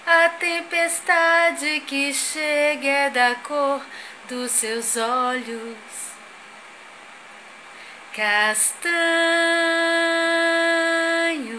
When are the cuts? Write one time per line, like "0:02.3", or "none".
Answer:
none